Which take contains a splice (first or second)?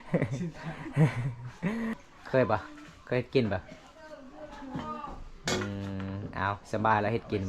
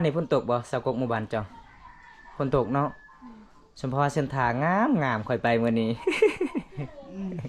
first